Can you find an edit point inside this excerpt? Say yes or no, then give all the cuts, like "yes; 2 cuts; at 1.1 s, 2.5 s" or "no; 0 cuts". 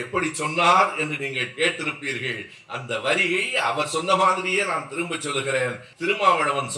yes; 1 cut; at 5.9 s